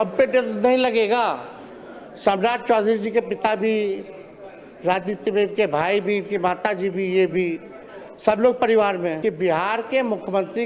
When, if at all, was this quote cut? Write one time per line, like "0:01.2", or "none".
0:09.2